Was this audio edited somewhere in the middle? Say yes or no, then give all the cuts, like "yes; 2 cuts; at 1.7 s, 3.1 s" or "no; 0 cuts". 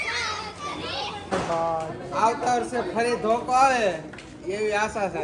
yes; 1 cut; at 1.3 s